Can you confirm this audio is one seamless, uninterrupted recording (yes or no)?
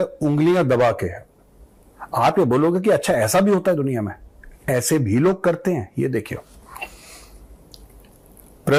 yes